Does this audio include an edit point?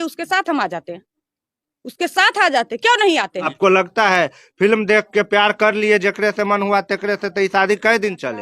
yes; 1 cut; at 3.5 s

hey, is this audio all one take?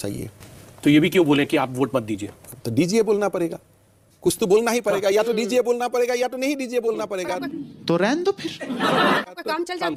yes; 0 cuts

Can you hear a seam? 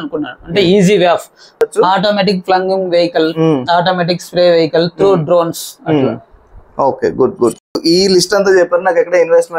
yes; 2 cuts; at 1.6 s, 7.8 s

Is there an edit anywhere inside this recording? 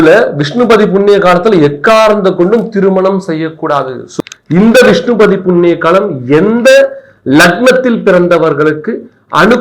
yes; 1 cut; at 4.0 s

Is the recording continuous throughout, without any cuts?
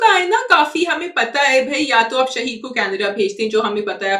yes; 0 cuts

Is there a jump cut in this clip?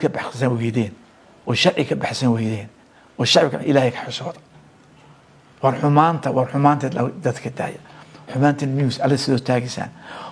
no; 0 cuts

